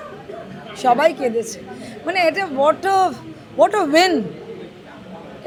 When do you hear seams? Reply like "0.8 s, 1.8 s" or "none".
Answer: none